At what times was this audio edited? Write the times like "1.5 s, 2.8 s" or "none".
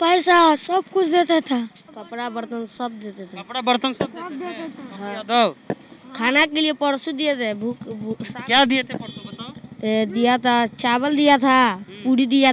1.9 s